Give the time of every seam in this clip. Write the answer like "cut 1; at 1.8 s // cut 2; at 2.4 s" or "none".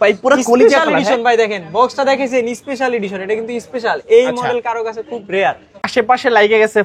cut 1; at 5.7 s

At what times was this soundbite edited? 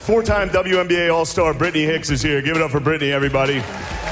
none

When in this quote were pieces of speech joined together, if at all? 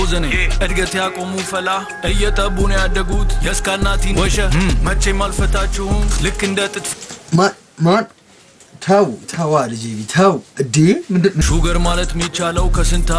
cut 1; at 11.4 s

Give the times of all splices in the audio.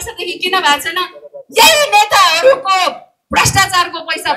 none

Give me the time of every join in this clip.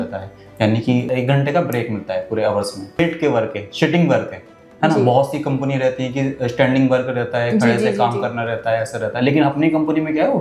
cut 1; at 1.1 s // cut 2; at 2.9 s

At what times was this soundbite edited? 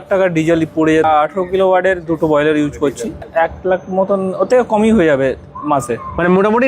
cut 1; at 1.0 s // cut 2; at 3.2 s

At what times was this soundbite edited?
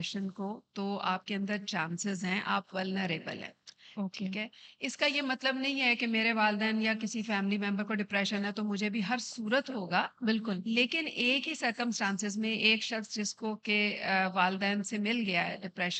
none

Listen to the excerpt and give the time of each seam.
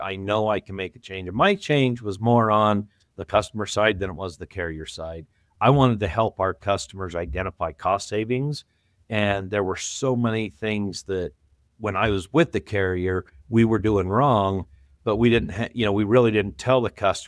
none

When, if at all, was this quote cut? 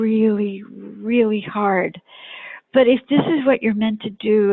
none

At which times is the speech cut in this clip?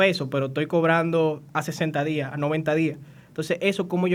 none

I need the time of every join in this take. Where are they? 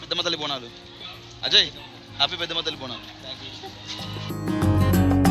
none

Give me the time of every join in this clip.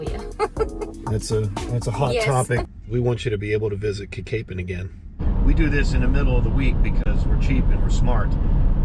cut 1; at 2.7 s // cut 2; at 5.2 s

